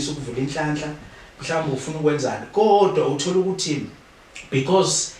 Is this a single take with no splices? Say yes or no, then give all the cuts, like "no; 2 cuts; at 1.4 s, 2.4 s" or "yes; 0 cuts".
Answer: yes; 0 cuts